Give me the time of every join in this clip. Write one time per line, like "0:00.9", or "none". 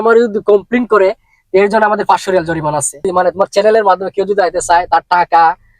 0:03.0